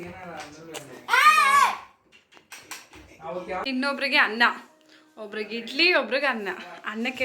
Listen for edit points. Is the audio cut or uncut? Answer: cut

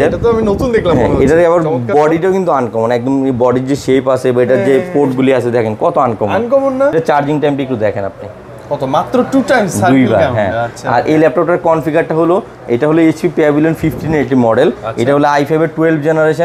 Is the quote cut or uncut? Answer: cut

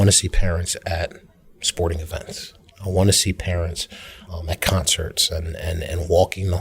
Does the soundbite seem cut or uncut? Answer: cut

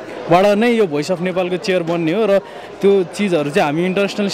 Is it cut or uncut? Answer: uncut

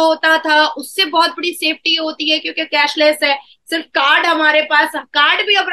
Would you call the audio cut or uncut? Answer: uncut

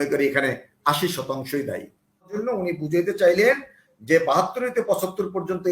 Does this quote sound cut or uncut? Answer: cut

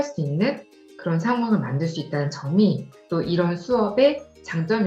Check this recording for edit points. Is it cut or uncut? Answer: uncut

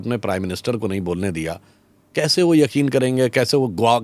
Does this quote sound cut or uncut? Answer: uncut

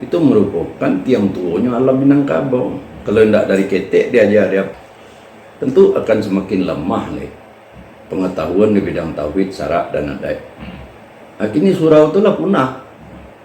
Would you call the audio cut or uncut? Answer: cut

